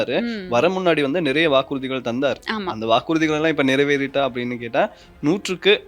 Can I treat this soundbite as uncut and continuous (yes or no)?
yes